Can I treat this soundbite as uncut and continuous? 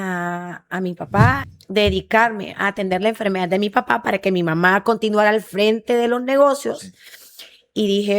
no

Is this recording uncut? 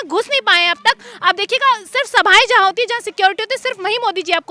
yes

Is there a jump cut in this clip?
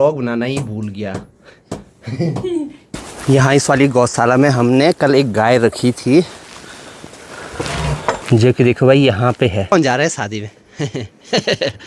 yes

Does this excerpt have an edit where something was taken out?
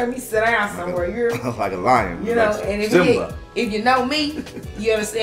no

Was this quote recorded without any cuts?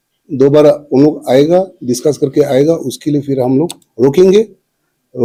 yes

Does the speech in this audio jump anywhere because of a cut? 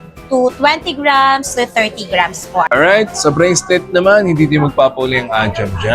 yes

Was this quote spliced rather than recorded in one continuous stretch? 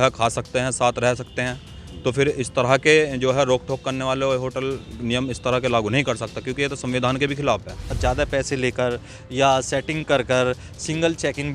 yes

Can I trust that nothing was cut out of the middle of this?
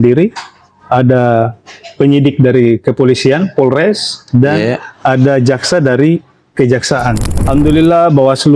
no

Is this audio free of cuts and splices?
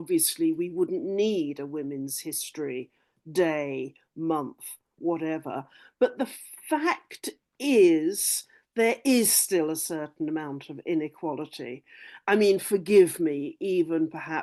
yes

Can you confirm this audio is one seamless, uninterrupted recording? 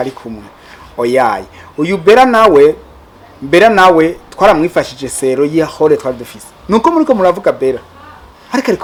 yes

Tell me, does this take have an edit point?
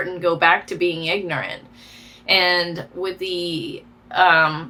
no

